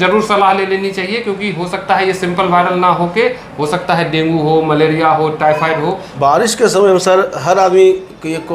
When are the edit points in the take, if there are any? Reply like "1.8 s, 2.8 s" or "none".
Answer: 6.1 s